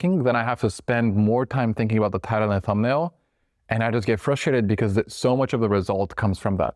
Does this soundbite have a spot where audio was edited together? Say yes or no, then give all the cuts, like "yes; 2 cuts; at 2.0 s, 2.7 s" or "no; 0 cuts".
no; 0 cuts